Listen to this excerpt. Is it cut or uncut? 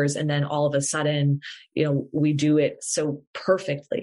uncut